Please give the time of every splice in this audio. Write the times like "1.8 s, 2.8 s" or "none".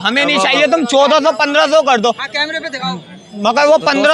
none